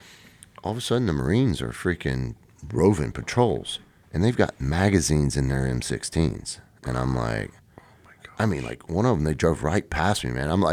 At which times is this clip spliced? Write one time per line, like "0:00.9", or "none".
none